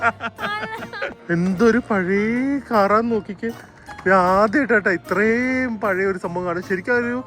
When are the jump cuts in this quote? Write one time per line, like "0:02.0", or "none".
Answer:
0:01.2